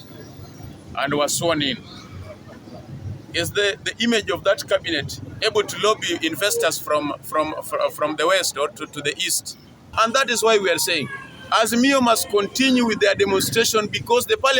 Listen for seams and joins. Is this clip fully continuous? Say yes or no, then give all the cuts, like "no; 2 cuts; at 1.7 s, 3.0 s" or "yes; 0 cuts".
no; 1 cut; at 9.9 s